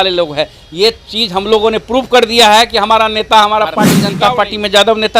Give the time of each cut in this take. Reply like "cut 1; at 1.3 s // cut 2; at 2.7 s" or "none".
cut 1; at 4.0 s